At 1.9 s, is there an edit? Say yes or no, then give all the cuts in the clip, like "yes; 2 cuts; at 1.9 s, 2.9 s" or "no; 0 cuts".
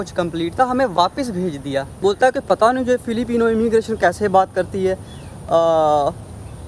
yes; 1 cut; at 1.9 s